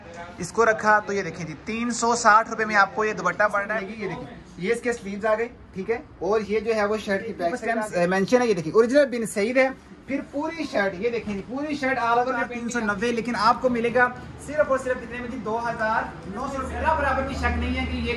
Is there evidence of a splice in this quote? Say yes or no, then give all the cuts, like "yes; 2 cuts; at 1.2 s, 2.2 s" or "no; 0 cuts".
yes; 4 cuts; at 3.8 s, 7.6 s, 12.6 s, 16.7 s